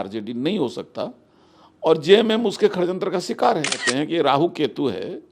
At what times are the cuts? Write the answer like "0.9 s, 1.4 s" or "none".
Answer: 3.8 s